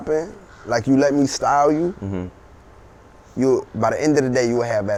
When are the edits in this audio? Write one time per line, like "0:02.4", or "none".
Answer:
none